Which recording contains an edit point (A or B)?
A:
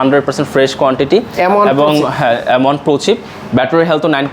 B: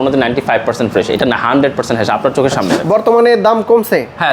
B